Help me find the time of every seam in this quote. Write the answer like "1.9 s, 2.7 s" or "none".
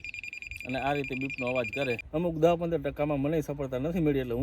2.0 s

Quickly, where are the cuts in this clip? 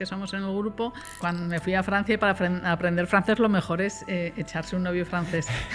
1.2 s

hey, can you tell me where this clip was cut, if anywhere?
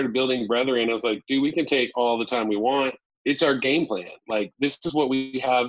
3.1 s

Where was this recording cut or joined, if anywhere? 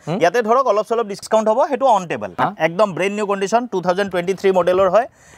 1.1 s, 2.2 s

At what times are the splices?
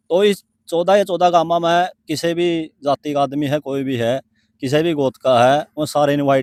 none

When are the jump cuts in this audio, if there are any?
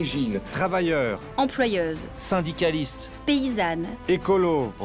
none

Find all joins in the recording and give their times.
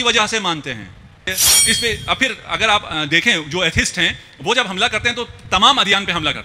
1.3 s

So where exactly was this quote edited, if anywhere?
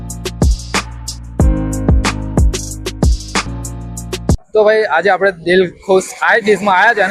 none

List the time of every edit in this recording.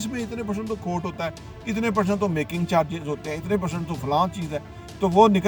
none

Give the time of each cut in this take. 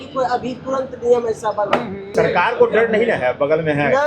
2.1 s

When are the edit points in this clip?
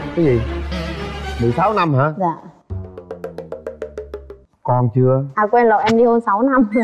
none

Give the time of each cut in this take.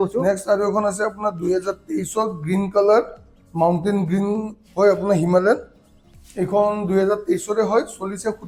none

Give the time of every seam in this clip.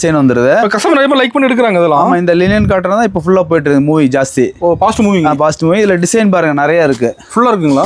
none

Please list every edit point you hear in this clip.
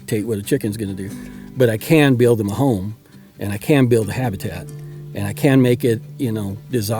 none

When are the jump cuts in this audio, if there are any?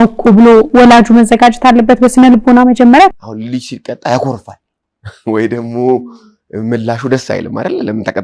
3.2 s

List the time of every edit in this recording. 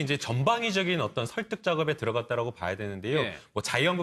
none

